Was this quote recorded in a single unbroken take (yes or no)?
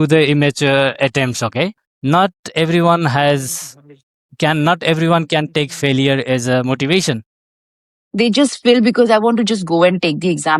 no